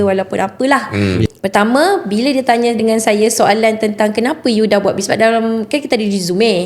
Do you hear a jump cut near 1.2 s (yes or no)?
yes